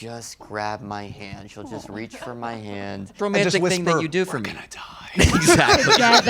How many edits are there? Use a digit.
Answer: 1